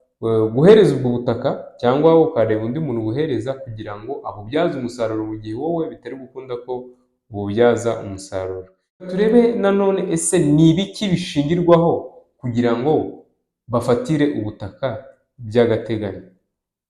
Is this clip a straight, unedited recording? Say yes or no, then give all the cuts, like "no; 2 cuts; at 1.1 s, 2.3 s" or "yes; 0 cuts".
no; 1 cut; at 9.1 s